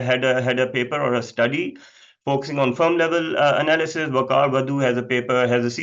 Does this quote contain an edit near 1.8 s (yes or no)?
no